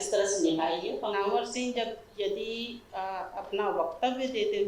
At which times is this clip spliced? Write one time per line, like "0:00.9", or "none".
0:00.9